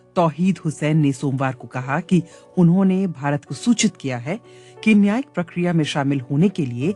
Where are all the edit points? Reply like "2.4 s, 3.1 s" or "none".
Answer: none

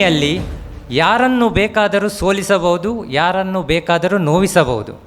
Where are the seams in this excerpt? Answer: none

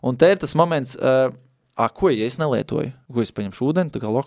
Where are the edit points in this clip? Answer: 3.0 s

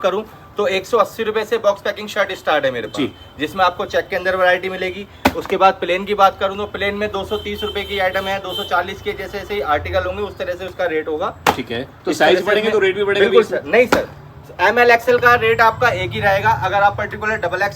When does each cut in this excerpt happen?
none

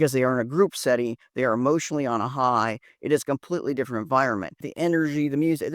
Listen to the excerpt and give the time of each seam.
4.6 s

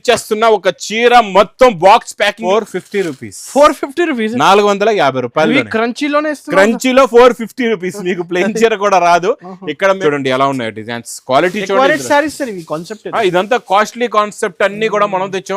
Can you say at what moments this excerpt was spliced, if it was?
2.4 s, 10.0 s

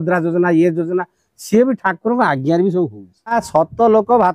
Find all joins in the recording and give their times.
3.3 s

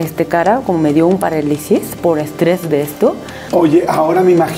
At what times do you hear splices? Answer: 3.3 s

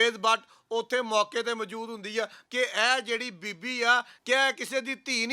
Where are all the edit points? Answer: 2.4 s, 4.1 s

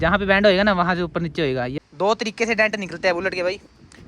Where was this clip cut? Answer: 1.7 s

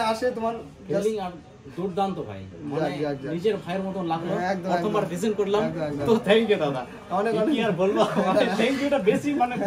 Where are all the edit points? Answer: none

